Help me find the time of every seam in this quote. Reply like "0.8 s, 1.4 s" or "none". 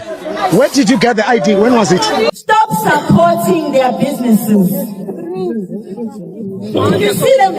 2.3 s

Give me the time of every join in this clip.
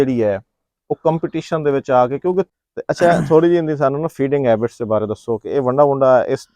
2.5 s

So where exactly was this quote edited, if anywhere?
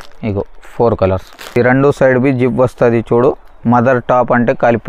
1.6 s

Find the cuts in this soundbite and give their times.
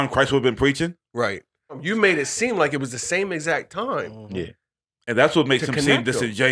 1.8 s

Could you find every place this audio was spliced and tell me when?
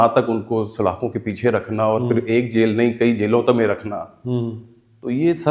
none

